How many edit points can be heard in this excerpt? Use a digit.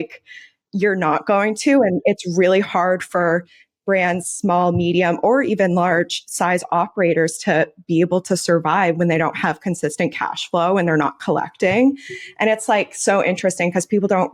1